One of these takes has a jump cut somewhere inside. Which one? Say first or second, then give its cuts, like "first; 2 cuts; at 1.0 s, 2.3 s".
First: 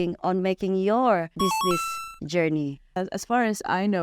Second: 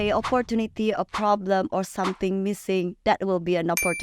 first; 2 cuts; at 1.3 s, 3.0 s